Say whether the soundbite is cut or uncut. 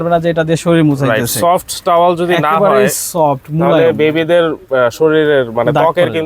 uncut